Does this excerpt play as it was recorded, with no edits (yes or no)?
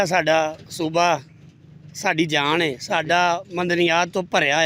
yes